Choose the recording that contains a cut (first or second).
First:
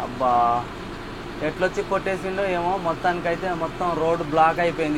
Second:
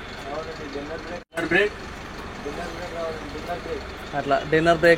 second